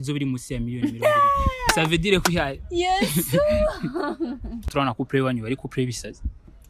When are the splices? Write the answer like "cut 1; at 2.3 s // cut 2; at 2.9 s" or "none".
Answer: cut 1; at 4.6 s